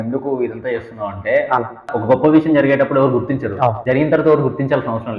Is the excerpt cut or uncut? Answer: cut